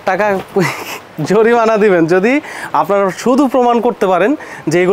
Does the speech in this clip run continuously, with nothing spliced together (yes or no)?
yes